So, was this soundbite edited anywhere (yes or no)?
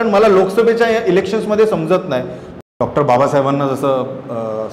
yes